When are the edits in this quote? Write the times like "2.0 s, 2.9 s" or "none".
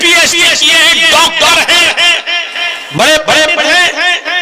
none

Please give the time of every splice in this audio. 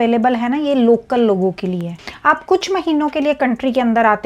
2.0 s

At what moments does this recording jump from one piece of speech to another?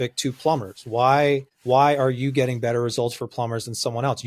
1.5 s

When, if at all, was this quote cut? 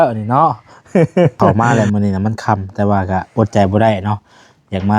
1.5 s

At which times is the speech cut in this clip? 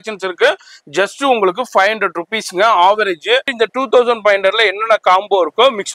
3.5 s

